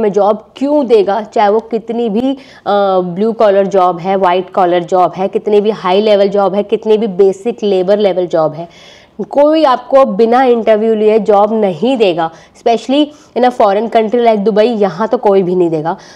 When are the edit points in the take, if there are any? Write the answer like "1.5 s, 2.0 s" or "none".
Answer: none